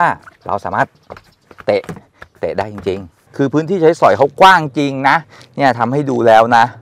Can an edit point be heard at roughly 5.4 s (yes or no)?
no